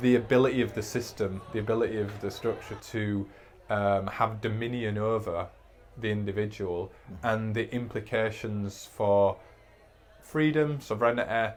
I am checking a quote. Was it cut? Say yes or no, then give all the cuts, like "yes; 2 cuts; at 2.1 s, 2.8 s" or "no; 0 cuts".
no; 0 cuts